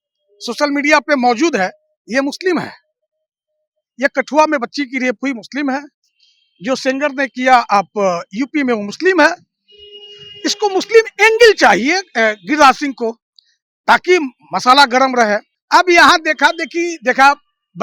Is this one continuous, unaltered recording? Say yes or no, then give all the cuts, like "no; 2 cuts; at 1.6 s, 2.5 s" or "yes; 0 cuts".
no; 1 cut; at 15.5 s